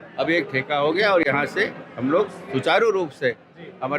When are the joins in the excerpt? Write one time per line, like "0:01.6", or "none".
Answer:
none